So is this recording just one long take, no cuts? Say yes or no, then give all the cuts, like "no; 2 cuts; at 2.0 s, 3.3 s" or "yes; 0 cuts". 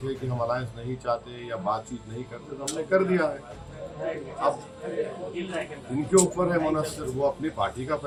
yes; 0 cuts